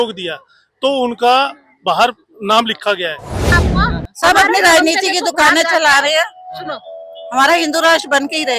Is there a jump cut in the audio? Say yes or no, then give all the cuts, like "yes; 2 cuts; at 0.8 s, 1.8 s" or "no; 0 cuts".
yes; 1 cut; at 3.5 s